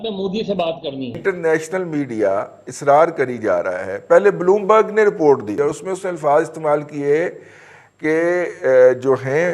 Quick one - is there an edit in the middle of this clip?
yes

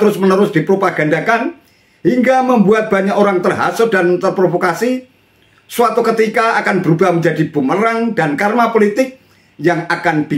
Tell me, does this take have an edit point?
no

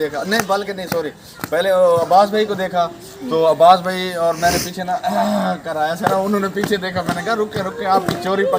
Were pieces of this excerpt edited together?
no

